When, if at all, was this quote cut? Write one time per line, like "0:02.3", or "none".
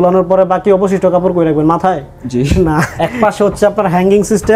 0:02.8